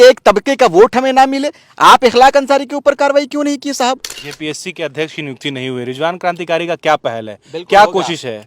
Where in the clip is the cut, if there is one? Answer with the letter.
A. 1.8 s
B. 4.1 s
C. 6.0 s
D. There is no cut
B